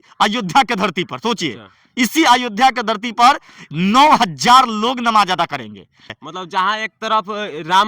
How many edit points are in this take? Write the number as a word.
one